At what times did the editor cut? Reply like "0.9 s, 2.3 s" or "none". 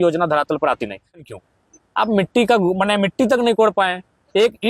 1.2 s